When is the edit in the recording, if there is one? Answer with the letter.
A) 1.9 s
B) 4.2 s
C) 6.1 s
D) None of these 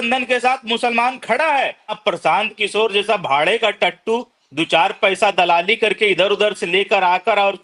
A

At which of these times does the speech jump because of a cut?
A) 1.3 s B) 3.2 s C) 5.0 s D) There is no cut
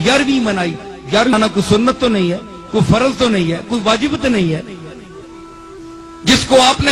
A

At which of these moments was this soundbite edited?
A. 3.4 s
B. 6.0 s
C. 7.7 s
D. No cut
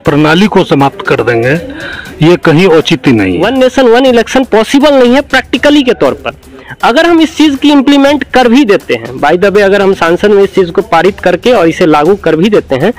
A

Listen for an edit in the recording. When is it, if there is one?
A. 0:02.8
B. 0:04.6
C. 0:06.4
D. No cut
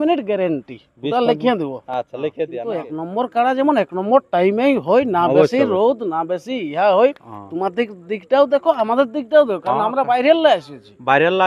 A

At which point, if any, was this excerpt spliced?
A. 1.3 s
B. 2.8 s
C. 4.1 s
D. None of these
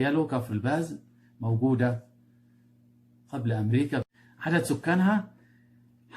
C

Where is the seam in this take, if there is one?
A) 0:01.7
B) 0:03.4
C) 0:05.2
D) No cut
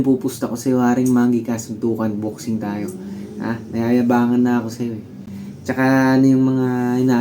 D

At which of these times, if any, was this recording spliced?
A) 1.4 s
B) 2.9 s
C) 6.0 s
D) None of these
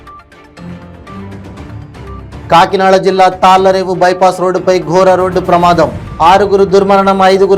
A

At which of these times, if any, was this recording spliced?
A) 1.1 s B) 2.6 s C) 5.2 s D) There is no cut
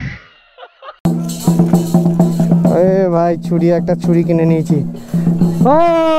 A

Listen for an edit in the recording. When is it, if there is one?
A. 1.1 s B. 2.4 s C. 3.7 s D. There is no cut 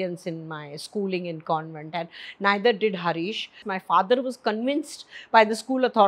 C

